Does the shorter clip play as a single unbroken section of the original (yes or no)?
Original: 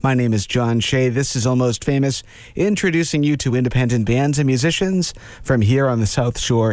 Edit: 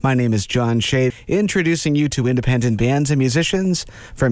no